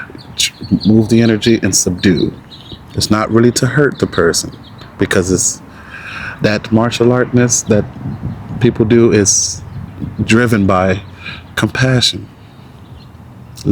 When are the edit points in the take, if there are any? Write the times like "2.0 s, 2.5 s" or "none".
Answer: none